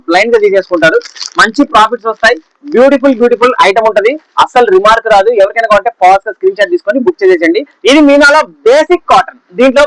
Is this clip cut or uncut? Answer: uncut